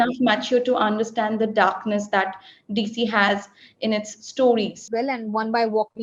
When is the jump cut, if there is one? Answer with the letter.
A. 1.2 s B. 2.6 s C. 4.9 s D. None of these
C